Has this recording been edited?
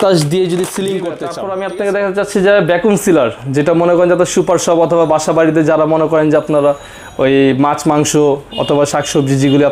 yes; 1 cut; at 1.2 s

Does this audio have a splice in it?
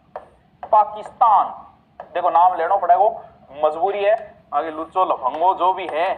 no; 0 cuts

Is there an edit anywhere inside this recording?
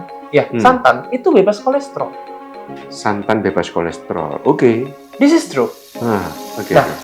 yes; 1 cut; at 5.0 s

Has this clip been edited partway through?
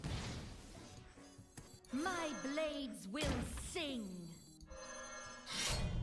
yes; 2 cuts; at 1.7 s, 4.5 s

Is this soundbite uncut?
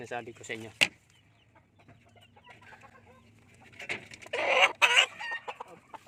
yes; 0 cuts

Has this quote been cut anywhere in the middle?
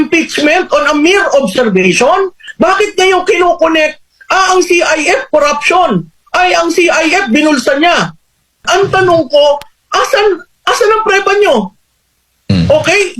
yes; 2 cuts; at 2.4 s, 8.7 s

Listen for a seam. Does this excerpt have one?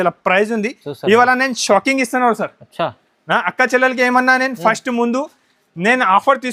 no; 0 cuts

